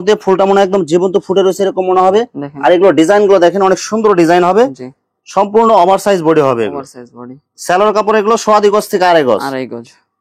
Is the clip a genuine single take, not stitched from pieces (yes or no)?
yes